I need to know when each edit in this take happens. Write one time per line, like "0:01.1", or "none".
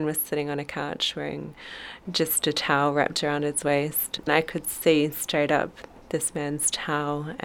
0:04.2